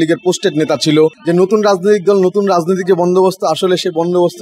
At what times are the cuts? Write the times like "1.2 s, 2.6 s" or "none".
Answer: 1.2 s